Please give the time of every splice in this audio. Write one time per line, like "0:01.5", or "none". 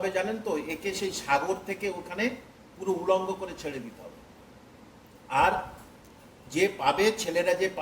none